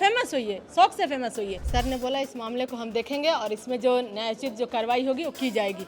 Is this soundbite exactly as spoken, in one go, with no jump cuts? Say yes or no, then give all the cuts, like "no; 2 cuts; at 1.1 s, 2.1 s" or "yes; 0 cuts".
no; 1 cut; at 1.6 s